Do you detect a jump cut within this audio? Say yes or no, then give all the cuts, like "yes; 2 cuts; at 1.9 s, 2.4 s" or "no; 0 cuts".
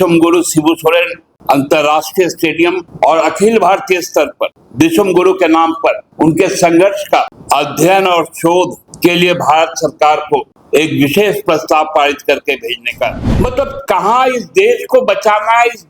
yes; 8 cuts; at 1.2 s, 2.9 s, 4.6 s, 6.1 s, 7.4 s, 8.8 s, 10.6 s, 13.2 s